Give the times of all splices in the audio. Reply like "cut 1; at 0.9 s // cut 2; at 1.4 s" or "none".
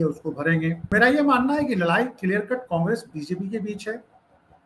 cut 1; at 0.9 s